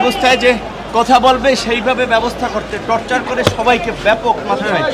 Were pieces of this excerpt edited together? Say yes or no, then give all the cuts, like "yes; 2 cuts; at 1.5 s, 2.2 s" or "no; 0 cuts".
no; 0 cuts